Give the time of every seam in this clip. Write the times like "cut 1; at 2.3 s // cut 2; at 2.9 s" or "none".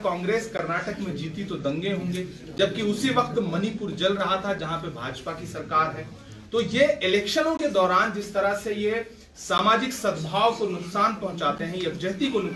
none